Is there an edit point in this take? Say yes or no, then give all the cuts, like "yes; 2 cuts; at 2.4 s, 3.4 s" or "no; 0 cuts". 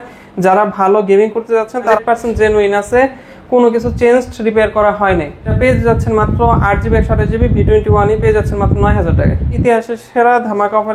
yes; 3 cuts; at 2.0 s, 5.5 s, 9.6 s